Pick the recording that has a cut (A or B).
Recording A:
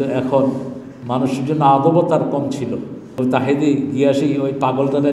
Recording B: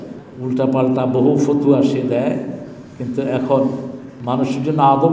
A